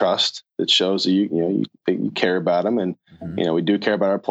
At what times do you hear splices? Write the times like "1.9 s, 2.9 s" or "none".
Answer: none